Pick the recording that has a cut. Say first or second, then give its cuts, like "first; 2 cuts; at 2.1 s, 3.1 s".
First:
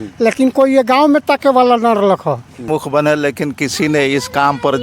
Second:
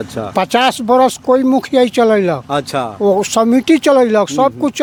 first; 1 cut; at 2.7 s